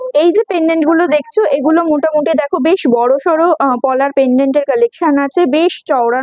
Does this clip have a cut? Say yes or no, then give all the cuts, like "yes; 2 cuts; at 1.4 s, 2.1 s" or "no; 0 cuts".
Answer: no; 0 cuts